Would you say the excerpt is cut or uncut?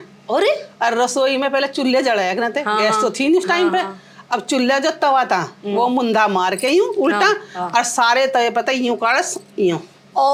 uncut